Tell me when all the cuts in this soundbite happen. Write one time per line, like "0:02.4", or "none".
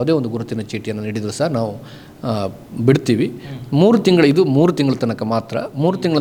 none